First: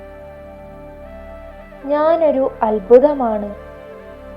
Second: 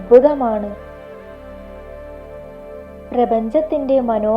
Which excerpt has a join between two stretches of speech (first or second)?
first